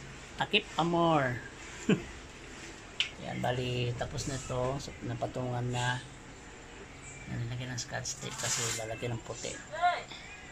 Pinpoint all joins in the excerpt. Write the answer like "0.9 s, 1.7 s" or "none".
none